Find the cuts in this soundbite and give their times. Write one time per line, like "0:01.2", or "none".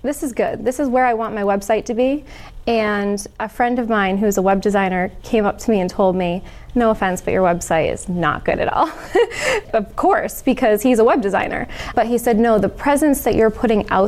none